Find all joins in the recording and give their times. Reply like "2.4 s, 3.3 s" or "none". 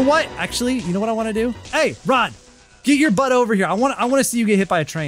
1.6 s